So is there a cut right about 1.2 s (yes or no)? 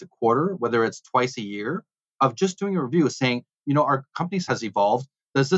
no